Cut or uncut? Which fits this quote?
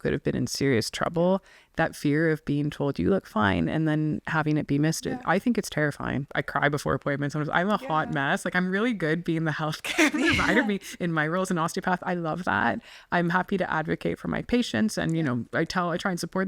cut